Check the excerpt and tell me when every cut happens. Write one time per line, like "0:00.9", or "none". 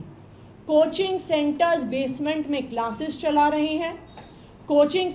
none